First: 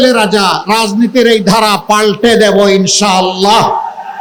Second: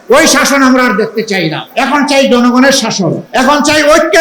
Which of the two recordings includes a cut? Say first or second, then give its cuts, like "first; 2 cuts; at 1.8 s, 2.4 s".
second; 2 cuts; at 1.6 s, 3.2 s